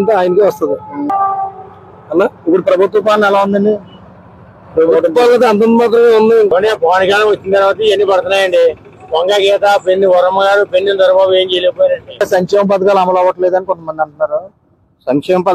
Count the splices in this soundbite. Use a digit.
3